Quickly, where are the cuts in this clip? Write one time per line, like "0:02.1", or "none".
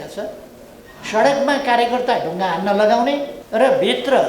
0:03.4